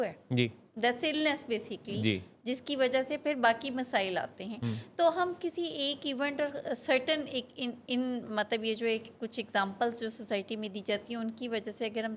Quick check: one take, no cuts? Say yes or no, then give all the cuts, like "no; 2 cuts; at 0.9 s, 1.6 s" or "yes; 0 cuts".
yes; 0 cuts